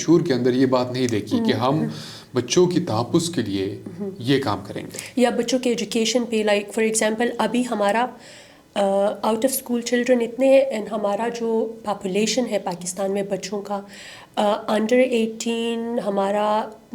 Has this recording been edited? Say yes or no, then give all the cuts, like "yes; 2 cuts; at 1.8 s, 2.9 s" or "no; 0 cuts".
no; 0 cuts